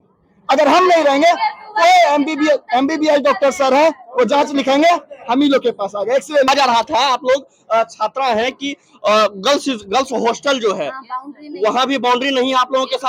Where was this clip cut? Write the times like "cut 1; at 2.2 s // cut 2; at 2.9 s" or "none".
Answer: none